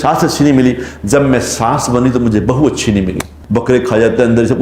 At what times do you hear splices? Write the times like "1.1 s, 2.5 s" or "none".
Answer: 3.3 s